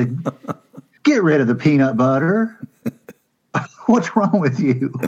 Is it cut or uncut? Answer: cut